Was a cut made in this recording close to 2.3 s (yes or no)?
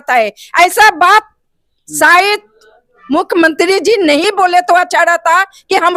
no